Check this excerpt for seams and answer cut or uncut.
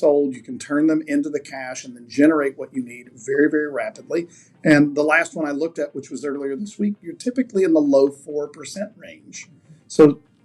uncut